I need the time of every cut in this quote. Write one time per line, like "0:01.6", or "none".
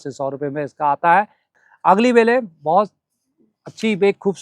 0:01.6